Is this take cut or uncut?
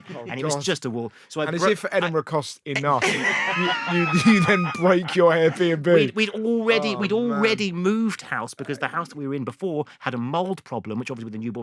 uncut